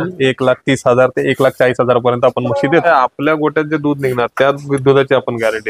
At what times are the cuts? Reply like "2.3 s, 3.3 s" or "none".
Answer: 2.8 s